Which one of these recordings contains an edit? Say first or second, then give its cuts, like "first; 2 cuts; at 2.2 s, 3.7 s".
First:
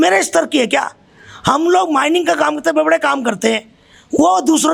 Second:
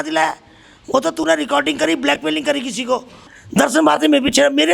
second; 1 cut; at 3.3 s